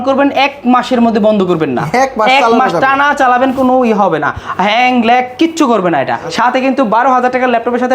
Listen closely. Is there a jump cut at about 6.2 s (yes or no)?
yes